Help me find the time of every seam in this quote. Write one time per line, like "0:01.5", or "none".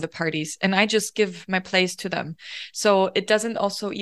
none